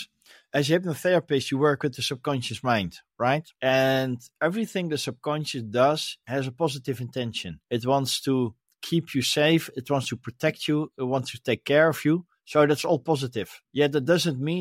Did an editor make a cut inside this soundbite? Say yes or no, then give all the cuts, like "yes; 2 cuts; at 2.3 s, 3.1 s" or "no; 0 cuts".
no; 0 cuts